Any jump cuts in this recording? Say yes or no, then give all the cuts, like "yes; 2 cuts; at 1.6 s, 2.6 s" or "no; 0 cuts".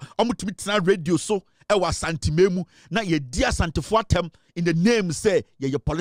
no; 0 cuts